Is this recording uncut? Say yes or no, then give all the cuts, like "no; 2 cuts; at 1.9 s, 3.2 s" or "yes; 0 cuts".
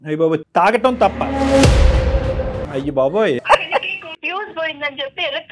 no; 2 cuts; at 2.6 s, 4.1 s